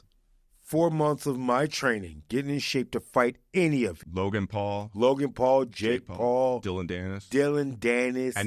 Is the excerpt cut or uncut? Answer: cut